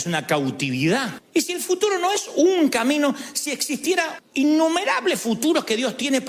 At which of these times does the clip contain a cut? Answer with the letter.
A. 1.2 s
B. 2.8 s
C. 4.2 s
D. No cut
A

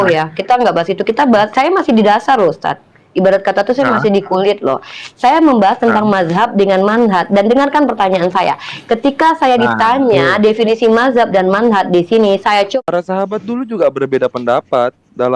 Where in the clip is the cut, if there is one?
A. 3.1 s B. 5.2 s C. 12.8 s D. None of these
C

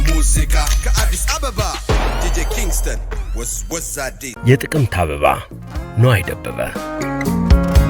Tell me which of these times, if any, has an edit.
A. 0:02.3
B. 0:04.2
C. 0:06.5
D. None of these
B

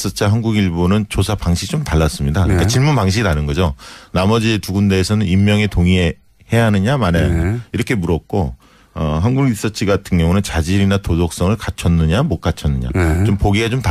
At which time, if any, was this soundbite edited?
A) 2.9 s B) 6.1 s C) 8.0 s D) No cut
C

